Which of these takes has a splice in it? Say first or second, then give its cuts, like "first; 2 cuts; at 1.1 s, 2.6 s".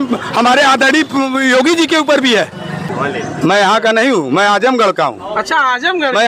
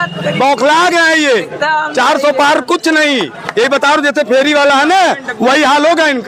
first; 1 cut; at 2.9 s